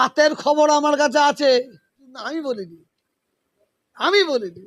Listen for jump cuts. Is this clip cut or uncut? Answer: cut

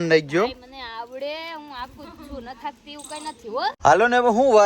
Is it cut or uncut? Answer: cut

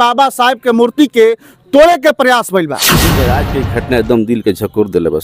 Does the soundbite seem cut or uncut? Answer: cut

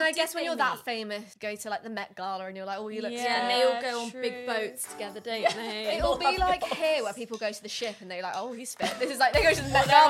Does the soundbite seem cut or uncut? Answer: cut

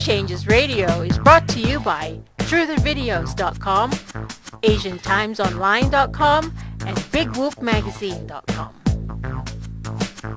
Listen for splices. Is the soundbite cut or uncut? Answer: uncut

